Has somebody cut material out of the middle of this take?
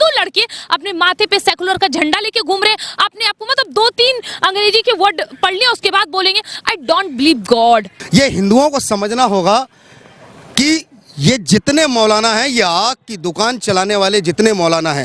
yes; 1 cut; at 8.0 s

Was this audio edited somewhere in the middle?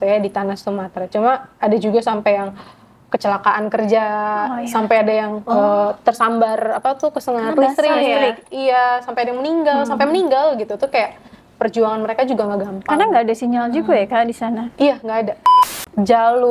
yes; 1 cut; at 15.4 s

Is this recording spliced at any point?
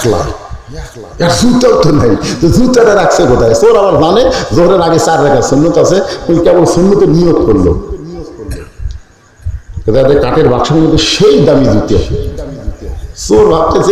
no; 0 cuts

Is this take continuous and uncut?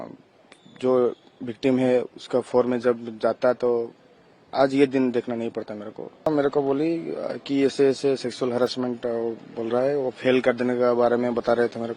no; 1 cut; at 6.3 s

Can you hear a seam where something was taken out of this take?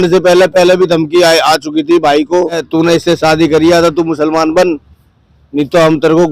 yes; 1 cut; at 2.6 s

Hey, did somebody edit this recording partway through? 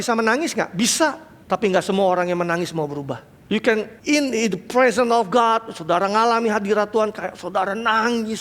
yes; 3 cuts; at 1.3 s, 3.3 s, 3.9 s

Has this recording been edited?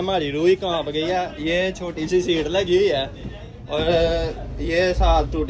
yes; 1 cut; at 1.3 s

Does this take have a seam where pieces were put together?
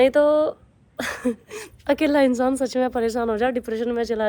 no; 0 cuts

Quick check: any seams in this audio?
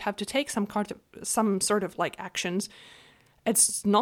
no; 0 cuts

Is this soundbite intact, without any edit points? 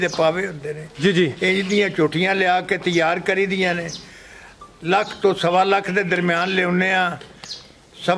yes; 0 cuts

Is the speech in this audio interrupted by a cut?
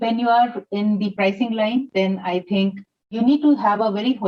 yes; 2 cuts; at 1.1 s, 3.1 s

